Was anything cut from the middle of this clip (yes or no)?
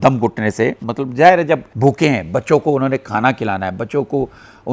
yes